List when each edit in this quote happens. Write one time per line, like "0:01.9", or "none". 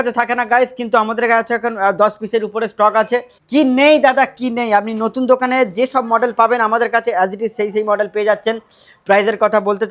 0:03.4